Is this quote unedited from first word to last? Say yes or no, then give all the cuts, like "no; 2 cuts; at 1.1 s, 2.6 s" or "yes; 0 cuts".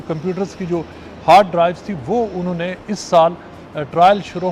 yes; 0 cuts